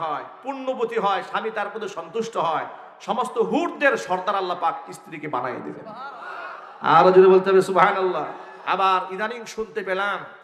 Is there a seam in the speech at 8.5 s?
yes; 1 cut; at 8.5 s

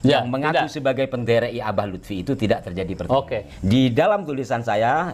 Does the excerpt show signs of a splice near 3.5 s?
yes; 1 cut; at 3.5 s

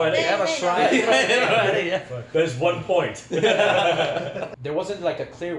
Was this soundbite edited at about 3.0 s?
no; 1 cut; at 4.5 s

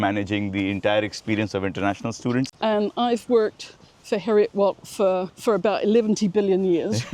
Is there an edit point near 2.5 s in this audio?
yes; 1 cut; at 2.5 s

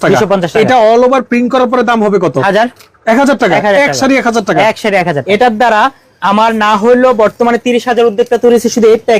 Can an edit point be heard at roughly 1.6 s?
no; 1 cut; at 5.2 s

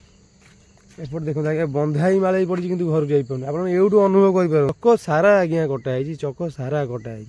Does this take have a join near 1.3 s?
no; 1 cut; at 4.8 s

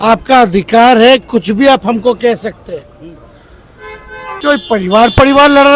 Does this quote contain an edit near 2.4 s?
no; 1 cut; at 4.4 s

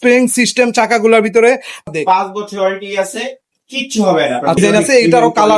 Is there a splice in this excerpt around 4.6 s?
yes; 2 cuts; at 1.9 s, 4.6 s

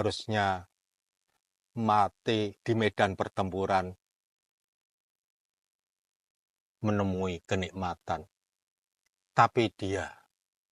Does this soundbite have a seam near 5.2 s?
no; 1 cut; at 2.6 s

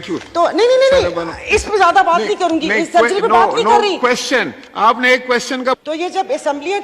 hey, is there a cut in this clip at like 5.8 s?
yes; 1 cut; at 5.8 s

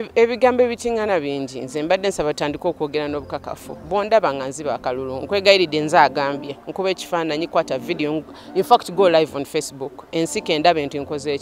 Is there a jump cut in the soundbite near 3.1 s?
no; 0 cuts

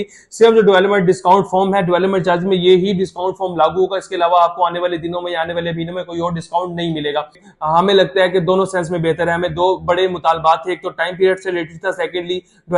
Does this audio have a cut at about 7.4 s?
yes; 1 cut; at 7.4 s

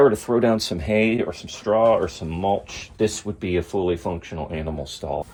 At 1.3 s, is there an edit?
no; 0 cuts

